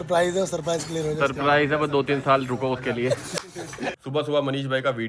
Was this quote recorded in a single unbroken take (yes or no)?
no